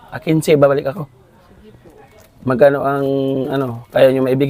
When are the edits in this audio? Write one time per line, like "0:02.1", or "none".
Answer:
none